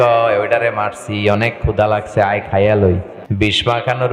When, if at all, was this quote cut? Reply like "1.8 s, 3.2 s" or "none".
3.2 s